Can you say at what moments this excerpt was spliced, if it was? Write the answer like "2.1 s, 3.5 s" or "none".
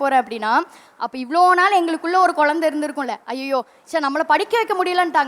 3.8 s